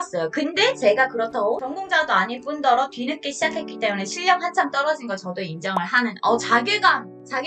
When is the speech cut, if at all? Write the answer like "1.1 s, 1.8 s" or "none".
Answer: none